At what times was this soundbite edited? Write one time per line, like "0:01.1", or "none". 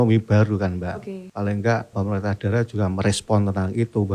0:01.2
0:01.9